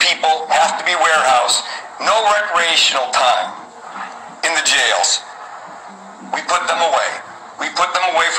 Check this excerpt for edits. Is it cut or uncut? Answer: uncut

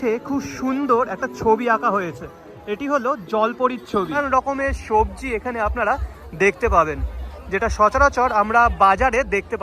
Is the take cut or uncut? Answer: cut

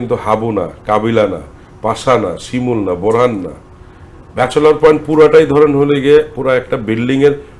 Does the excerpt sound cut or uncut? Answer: uncut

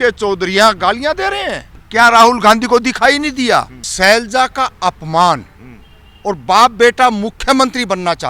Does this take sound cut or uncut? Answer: cut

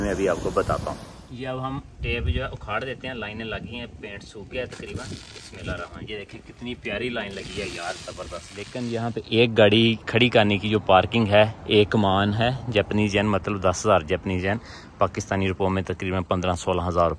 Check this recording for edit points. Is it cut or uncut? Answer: cut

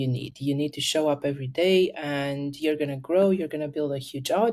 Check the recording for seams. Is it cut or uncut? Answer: uncut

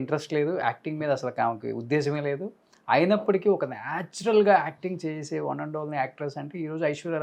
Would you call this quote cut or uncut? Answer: uncut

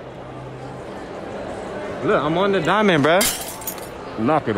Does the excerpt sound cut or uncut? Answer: uncut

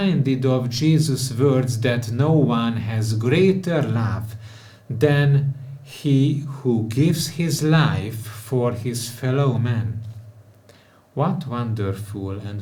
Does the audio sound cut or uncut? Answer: uncut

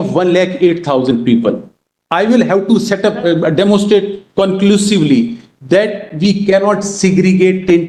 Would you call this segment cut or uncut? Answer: uncut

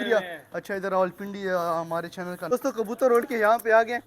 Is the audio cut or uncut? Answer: cut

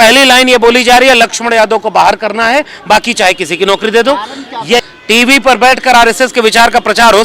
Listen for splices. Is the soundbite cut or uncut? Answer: cut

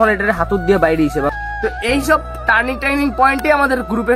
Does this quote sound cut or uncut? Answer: cut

